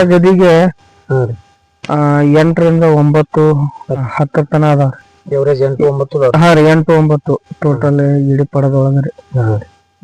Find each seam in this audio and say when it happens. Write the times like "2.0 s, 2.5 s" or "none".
none